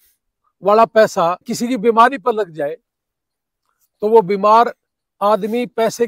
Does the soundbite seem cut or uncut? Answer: cut